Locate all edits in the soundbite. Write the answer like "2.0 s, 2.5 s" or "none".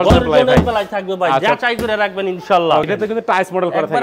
2.9 s